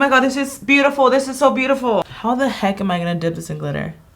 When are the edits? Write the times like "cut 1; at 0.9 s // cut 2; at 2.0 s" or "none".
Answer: cut 1; at 2.1 s